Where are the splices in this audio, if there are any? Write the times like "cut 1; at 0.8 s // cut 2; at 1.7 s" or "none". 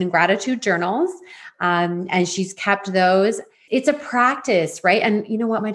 cut 1; at 3.6 s